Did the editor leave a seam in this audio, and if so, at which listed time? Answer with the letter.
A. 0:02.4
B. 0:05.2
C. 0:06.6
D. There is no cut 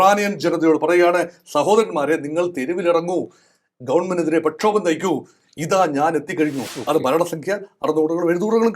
C